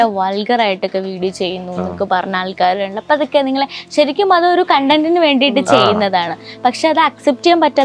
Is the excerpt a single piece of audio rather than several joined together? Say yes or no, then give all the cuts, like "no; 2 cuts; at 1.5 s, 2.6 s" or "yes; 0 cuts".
yes; 0 cuts